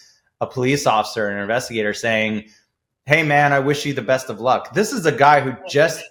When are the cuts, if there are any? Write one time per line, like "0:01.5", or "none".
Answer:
none